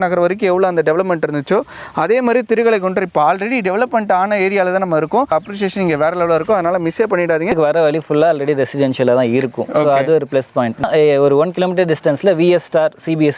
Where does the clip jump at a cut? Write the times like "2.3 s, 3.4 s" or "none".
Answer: 5.3 s, 7.5 s, 10.8 s